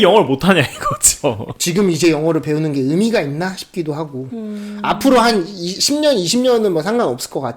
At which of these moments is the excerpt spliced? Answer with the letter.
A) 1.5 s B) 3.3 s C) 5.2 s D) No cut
A